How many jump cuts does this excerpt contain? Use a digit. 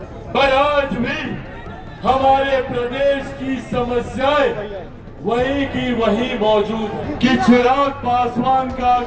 1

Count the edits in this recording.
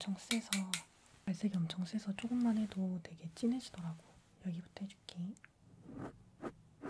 0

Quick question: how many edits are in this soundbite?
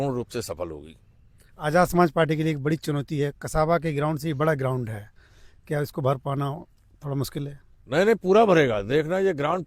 0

